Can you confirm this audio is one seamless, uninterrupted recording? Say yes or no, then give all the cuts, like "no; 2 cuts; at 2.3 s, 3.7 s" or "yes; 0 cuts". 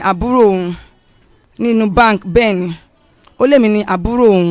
yes; 0 cuts